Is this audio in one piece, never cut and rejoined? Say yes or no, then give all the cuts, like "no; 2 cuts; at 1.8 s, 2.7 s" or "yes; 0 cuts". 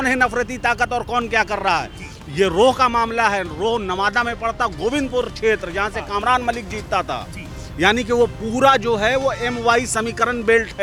yes; 0 cuts